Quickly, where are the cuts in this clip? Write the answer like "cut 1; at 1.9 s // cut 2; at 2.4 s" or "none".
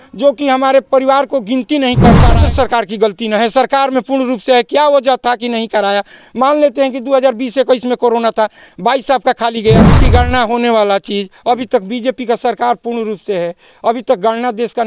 cut 1; at 2.4 s // cut 2; at 9.9 s

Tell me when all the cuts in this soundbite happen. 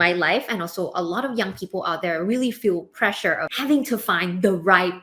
cut 1; at 3.5 s

